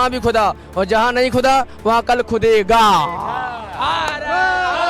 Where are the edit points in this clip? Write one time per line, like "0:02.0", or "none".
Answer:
none